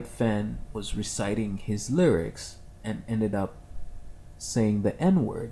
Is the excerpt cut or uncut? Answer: uncut